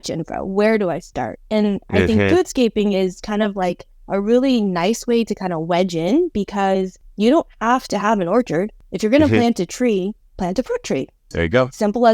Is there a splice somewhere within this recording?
yes; 2 cuts; at 7.0 s, 11.2 s

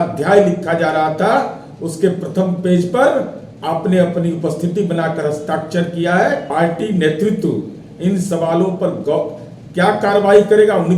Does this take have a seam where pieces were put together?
yes; 1 cut; at 6.5 s

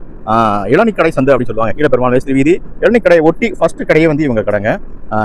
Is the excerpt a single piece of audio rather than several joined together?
yes; 0 cuts

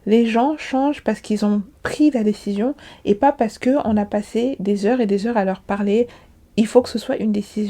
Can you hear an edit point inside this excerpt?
yes; 1 cut; at 6.2 s

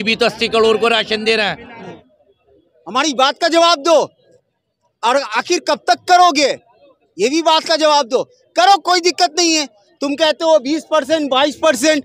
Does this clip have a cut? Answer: yes; 1 cut; at 2.1 s

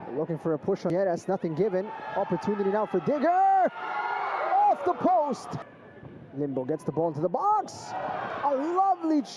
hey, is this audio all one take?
no; 1 cut; at 0.9 s

